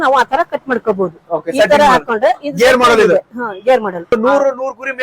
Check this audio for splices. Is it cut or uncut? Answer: cut